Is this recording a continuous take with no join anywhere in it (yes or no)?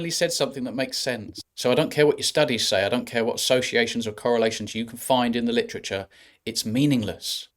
no